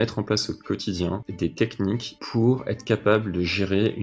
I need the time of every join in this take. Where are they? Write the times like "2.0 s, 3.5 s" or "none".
1.3 s, 2.1 s